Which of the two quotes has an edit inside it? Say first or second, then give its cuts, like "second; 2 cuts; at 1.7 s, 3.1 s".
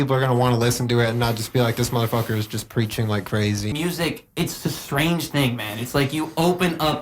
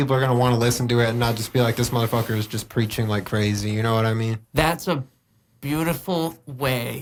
first; 1 cut; at 3.7 s